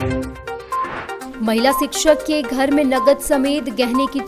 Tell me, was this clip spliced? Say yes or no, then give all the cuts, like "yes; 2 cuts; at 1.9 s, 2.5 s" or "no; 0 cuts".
yes; 1 cut; at 1.2 s